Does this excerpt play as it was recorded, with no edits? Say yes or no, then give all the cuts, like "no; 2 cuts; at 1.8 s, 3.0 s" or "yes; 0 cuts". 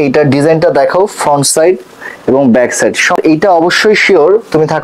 no; 1 cut; at 3.2 s